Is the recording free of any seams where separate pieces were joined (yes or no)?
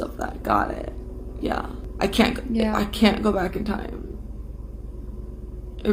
no